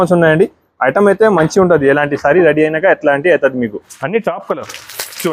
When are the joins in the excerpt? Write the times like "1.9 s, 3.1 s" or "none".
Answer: 3.9 s